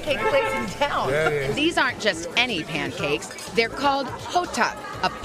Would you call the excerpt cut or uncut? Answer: cut